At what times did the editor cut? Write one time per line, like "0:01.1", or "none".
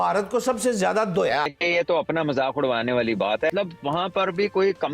0:01.5
0:03.5